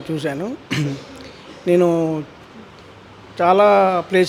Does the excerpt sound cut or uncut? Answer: uncut